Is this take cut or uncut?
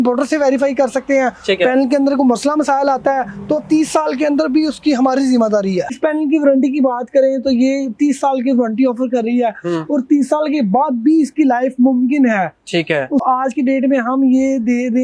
cut